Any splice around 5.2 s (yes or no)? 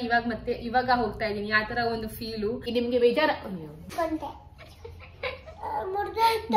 no